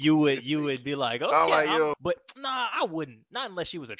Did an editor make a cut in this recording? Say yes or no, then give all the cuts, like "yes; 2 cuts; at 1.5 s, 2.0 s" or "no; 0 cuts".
yes; 1 cut; at 1.9 s